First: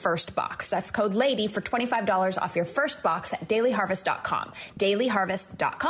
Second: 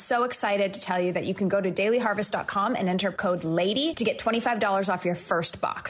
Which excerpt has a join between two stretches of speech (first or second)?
second